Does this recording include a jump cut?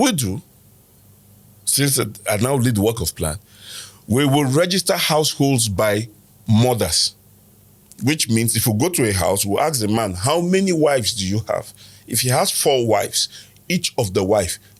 no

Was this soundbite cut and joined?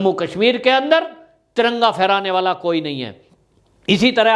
no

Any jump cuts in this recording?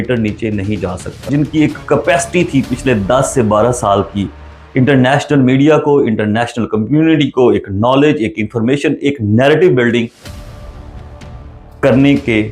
yes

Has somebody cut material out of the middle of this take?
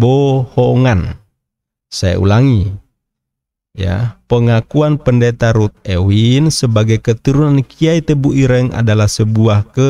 no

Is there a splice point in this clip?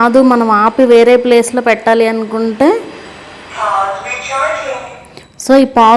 no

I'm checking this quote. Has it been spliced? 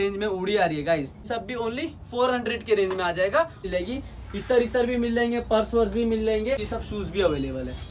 yes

